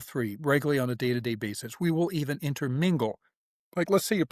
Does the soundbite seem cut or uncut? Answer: uncut